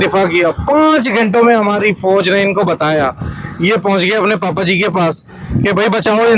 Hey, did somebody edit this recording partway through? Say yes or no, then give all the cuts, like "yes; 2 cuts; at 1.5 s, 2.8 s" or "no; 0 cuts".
no; 0 cuts